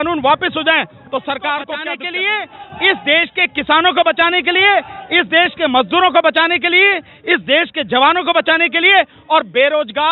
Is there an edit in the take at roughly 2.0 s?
yes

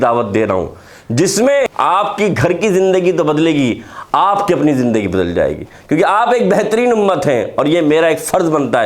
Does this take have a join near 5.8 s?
no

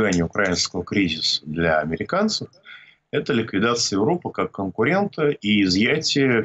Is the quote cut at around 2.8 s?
no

